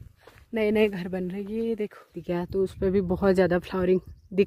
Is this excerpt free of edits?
no; 1 cut; at 2.2 s

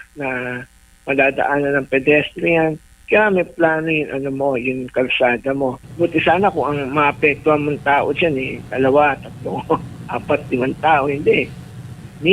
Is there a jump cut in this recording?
yes; 1 cut; at 5.8 s

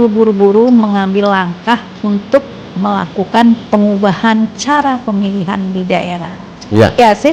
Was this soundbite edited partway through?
no; 0 cuts

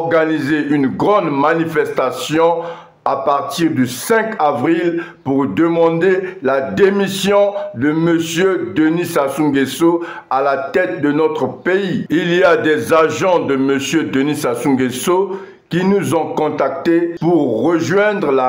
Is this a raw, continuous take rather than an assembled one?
yes; 0 cuts

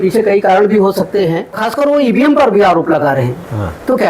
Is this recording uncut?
no; 1 cut; at 1.6 s

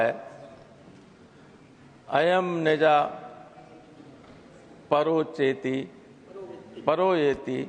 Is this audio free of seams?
yes; 0 cuts

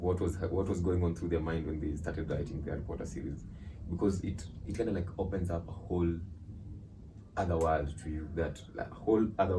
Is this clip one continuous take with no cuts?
yes; 0 cuts

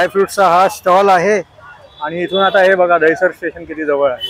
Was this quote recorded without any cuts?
yes; 0 cuts

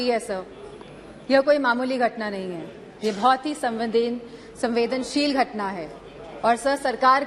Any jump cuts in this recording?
no; 0 cuts

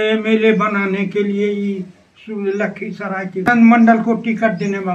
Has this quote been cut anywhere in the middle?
yes; 1 cut; at 3.5 s

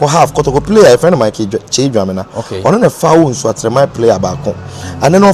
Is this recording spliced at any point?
no; 0 cuts

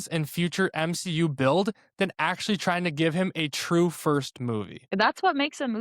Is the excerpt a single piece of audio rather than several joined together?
no; 1 cut; at 4.8 s

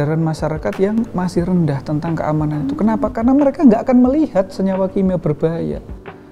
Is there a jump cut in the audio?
no; 0 cuts

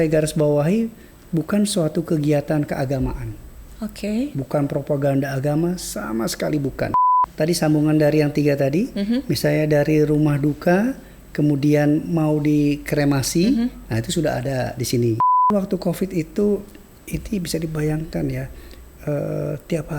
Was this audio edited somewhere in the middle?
yes; 2 cuts; at 7.2 s, 15.5 s

